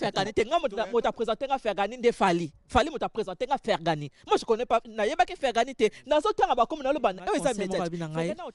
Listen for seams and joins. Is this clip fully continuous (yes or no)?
yes